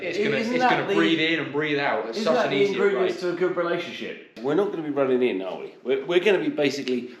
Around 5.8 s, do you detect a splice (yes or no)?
no